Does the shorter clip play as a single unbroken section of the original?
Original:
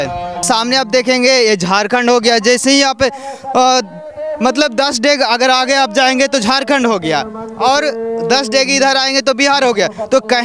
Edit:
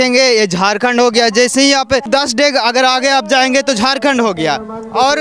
no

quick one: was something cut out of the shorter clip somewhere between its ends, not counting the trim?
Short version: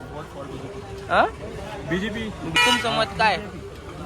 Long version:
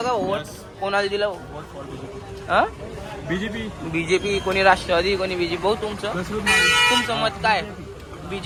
yes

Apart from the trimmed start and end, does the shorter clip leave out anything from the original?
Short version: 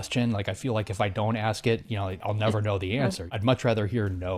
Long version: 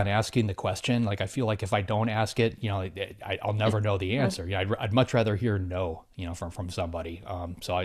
yes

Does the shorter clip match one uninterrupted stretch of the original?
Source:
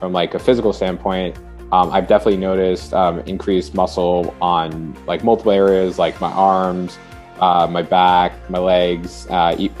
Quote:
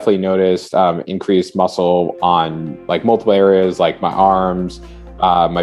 yes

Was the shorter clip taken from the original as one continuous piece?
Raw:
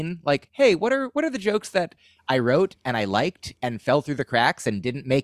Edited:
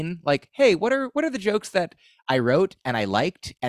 yes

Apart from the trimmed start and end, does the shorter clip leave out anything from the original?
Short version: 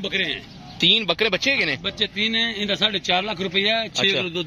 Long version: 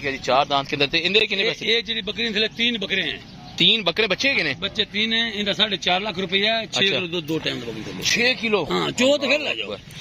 no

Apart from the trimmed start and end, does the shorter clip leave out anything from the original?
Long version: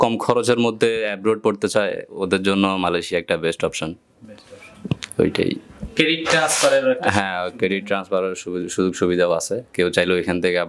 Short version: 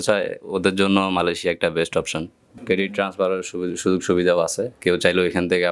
yes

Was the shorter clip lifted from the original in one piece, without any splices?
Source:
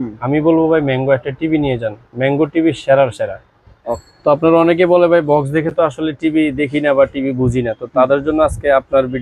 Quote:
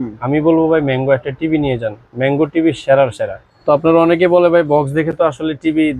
no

